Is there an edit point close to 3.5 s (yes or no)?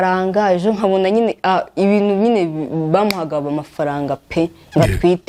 no